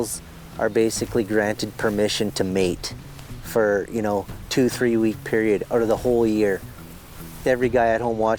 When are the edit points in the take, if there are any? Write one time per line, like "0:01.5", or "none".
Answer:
none